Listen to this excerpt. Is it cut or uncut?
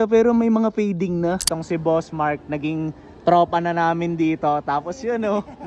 cut